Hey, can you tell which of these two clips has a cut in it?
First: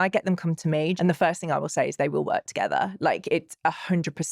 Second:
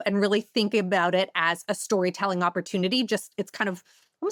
first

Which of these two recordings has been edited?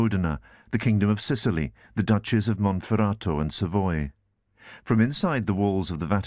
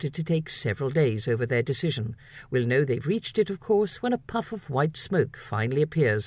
second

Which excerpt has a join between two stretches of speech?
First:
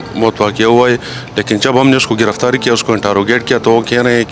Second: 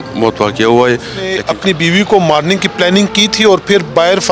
second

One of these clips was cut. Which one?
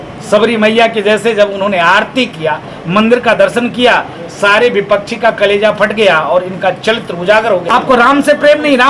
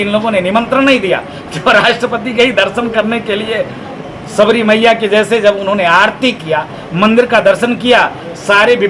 first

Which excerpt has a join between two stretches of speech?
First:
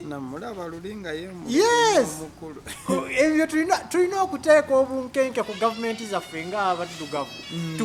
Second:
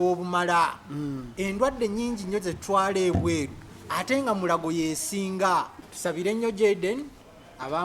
second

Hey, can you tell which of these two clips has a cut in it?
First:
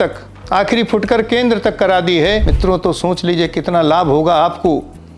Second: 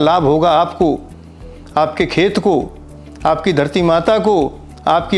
first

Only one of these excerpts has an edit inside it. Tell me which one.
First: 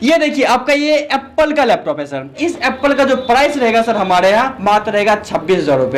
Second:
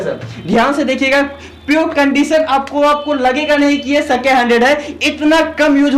first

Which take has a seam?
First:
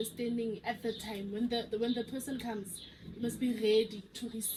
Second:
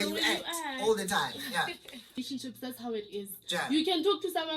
second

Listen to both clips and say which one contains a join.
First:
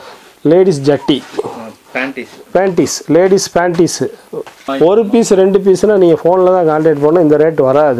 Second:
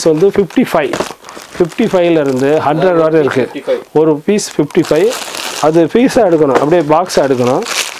first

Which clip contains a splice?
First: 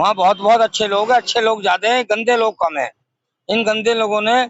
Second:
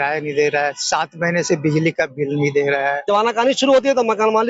second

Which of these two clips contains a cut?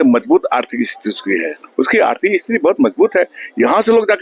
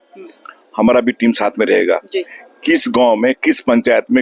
first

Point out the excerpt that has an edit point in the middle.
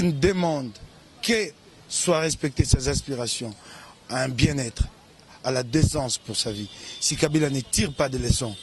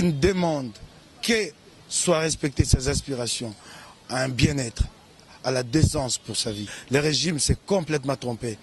second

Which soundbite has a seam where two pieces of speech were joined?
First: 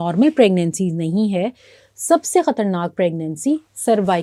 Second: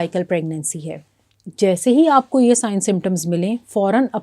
second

